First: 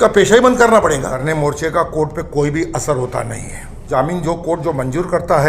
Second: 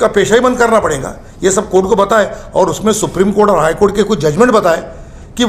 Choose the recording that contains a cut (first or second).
first